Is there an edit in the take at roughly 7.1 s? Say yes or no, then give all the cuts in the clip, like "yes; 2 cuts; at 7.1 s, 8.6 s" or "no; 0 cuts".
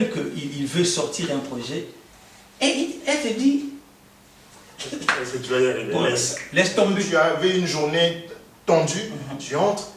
yes; 1 cut; at 7.1 s